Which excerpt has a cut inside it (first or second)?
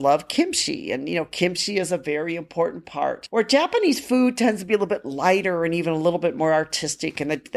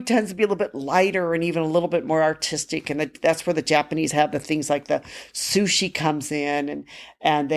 first